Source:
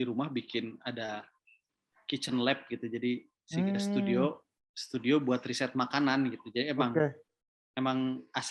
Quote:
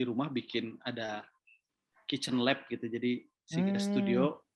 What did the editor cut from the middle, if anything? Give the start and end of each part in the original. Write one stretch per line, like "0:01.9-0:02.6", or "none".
none